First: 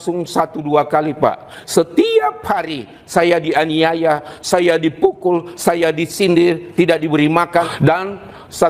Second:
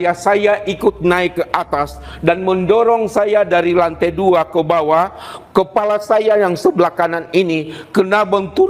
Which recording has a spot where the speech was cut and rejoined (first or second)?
first